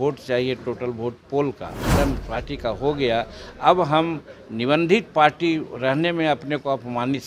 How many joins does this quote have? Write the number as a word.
one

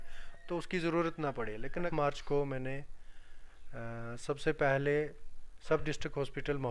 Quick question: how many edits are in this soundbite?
one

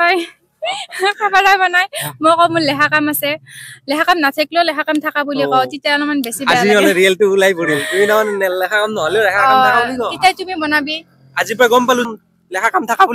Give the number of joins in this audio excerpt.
one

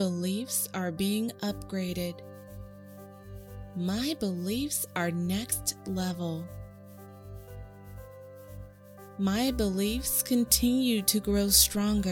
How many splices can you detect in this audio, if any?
four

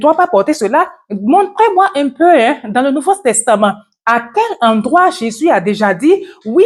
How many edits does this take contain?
zero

